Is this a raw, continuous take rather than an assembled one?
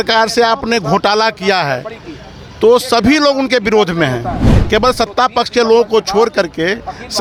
yes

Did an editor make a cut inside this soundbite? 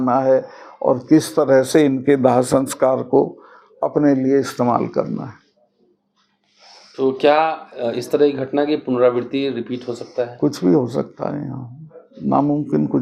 no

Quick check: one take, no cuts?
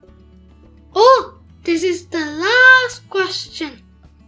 no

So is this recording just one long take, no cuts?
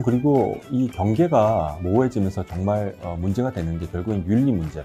yes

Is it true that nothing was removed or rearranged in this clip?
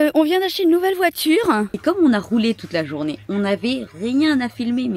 no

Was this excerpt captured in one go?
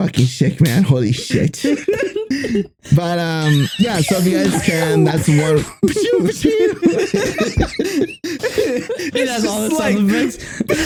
yes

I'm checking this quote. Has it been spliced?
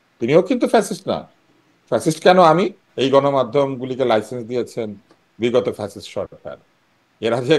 yes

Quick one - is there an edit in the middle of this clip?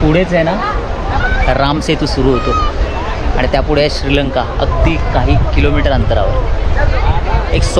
no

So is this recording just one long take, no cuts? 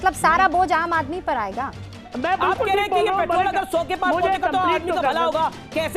no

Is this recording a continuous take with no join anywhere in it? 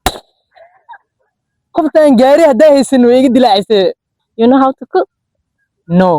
no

